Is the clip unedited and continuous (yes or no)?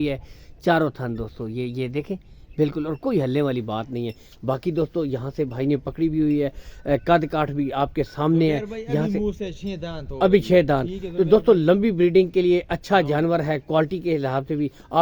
yes